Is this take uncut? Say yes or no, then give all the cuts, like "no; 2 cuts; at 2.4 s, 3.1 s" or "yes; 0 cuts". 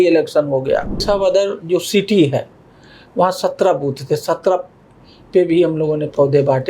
no; 1 cut; at 1.0 s